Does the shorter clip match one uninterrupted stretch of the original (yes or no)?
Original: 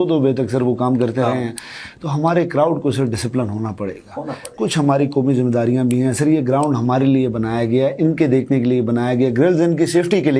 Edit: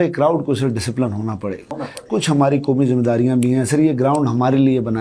no